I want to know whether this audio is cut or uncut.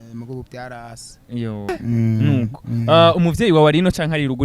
cut